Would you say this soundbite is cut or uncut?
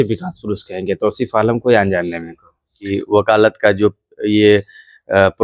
cut